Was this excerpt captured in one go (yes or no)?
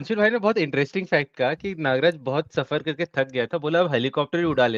yes